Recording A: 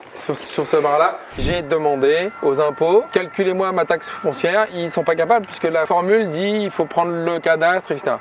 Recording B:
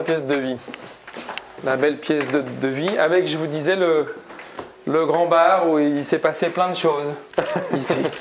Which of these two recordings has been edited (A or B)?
A